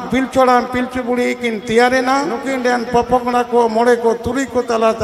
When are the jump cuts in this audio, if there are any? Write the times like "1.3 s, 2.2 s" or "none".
2.5 s